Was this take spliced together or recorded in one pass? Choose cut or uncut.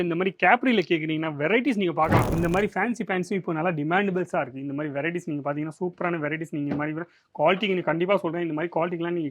cut